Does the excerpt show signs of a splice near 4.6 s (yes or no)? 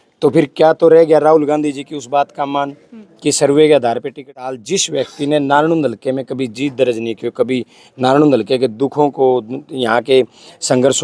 yes